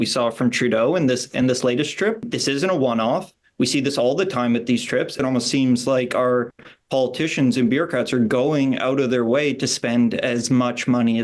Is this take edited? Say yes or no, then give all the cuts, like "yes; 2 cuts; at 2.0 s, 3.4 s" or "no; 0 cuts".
yes; 2 cuts; at 2.2 s, 5.2 s